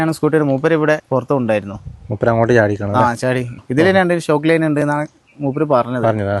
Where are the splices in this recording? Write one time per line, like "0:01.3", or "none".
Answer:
0:01.0
0:03.5

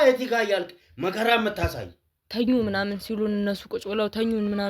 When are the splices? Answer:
0:02.2

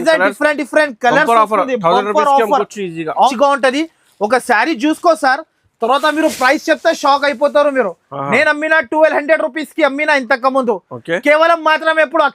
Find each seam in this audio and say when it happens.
0:03.3

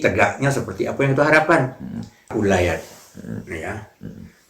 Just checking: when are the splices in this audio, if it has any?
0:02.2

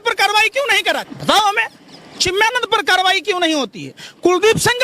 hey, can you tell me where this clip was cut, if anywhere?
0:01.1

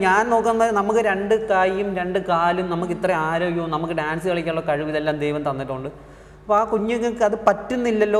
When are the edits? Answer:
none

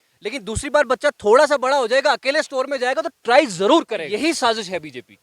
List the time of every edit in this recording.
0:04.0

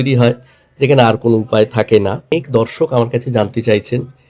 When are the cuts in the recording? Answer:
0:02.3

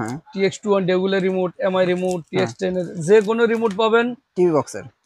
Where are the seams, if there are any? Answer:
none

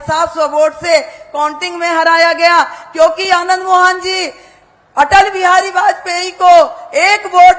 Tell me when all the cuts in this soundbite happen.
none

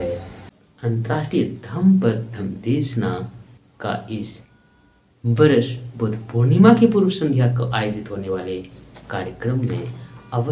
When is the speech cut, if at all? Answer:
none

